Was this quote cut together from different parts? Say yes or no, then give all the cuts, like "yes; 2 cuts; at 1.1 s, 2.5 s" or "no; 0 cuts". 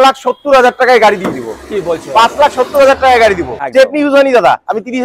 yes; 1 cut; at 3.6 s